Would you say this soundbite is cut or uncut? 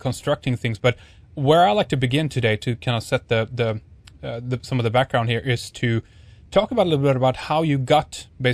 uncut